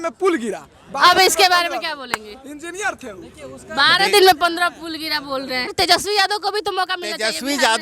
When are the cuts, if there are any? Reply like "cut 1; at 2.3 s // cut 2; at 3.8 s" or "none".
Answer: cut 1; at 5.7 s